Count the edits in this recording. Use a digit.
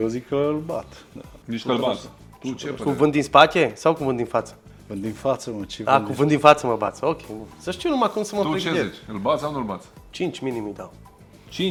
0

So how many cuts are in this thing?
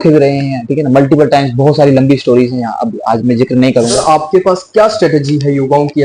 1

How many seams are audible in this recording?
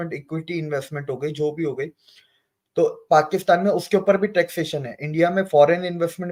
0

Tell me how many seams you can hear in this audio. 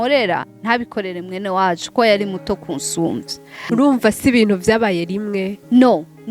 1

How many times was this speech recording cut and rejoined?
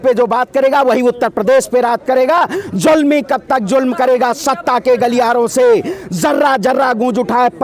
0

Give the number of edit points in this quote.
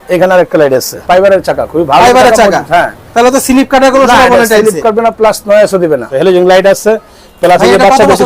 2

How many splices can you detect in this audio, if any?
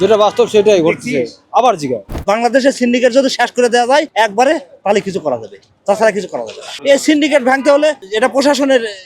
2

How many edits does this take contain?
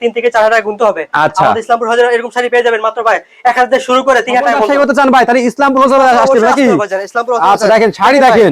1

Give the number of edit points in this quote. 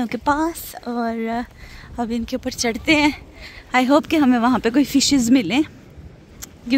0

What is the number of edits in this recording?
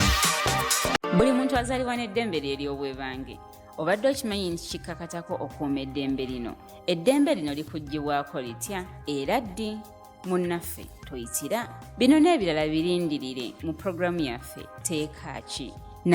1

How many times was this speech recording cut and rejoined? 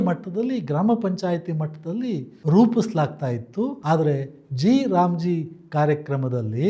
1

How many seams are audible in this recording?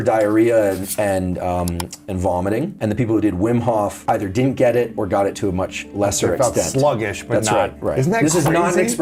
0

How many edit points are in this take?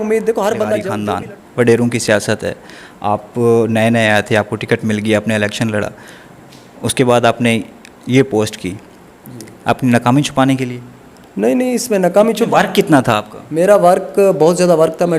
1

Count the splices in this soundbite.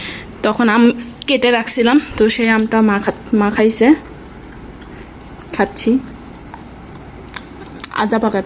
0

